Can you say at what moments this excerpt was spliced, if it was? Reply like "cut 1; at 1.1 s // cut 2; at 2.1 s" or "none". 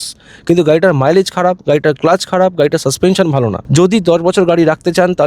cut 1; at 3.6 s